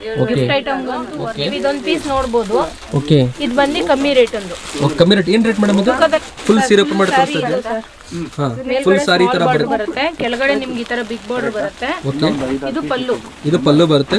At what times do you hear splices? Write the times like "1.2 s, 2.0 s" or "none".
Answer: 1.2 s, 6.2 s